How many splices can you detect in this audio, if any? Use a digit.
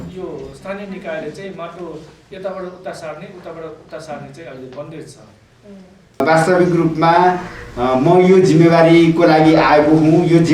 1